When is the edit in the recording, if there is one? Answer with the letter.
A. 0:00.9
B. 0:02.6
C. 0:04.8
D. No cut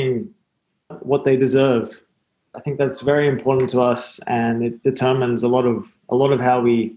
A